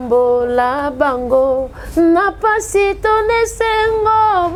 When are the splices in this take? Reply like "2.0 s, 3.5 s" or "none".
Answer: none